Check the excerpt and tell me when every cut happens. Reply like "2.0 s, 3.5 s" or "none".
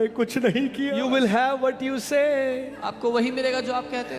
0.9 s